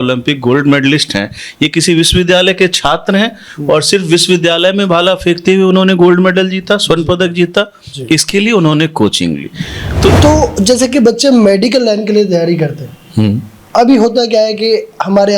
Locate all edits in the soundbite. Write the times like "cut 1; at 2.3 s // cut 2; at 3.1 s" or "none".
cut 1; at 10.1 s